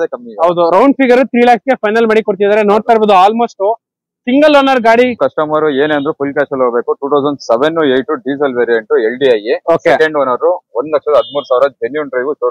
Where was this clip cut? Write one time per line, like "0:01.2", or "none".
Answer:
0:05.2